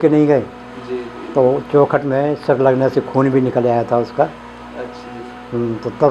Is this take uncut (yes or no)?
yes